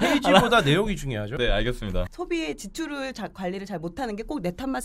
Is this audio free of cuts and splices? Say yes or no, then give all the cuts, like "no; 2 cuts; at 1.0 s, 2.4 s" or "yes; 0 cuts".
no; 1 cut; at 2.1 s